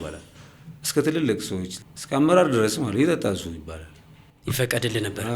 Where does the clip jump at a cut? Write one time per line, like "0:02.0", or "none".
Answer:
0:01.8